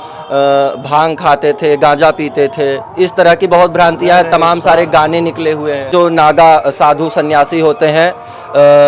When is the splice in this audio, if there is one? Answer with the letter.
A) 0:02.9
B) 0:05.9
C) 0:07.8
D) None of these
B